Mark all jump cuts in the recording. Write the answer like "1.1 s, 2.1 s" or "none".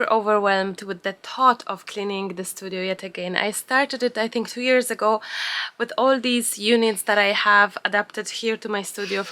none